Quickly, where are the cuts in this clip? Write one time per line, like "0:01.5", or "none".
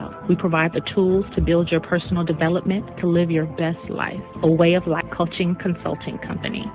0:05.1